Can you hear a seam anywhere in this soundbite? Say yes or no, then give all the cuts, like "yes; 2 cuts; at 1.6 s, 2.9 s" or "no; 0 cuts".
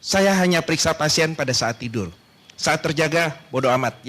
no; 0 cuts